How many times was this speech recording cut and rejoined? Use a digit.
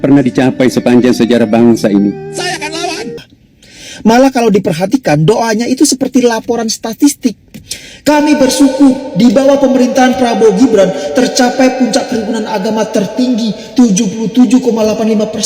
1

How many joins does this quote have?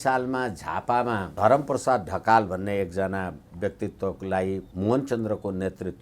2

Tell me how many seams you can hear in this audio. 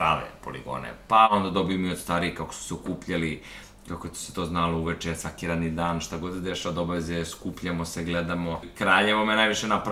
2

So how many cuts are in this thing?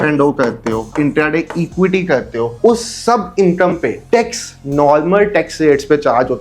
2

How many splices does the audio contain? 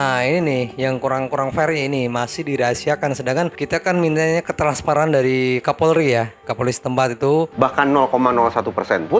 1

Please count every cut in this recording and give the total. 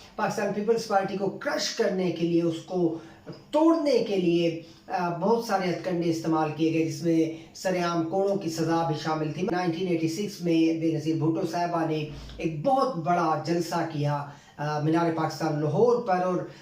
1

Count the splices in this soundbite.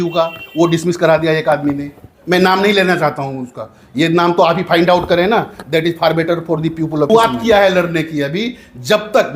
1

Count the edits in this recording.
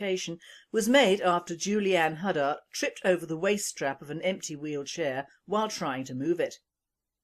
1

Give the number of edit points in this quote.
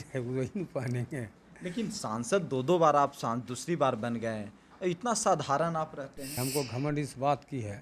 1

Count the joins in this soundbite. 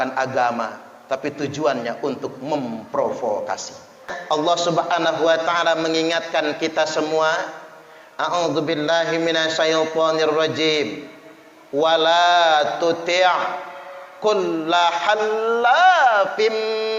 1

